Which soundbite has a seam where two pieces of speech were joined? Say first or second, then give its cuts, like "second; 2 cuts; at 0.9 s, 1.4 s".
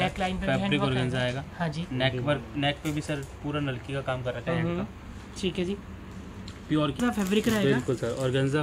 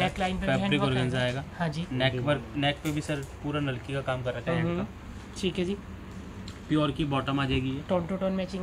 first; 1 cut; at 7.0 s